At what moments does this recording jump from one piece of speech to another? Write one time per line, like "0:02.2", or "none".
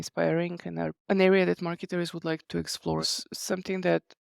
0:01.0
0:02.8